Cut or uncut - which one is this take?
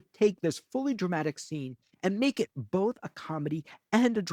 cut